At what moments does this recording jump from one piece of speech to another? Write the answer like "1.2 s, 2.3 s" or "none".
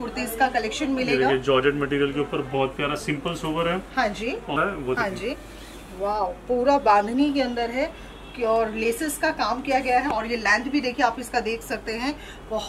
4.6 s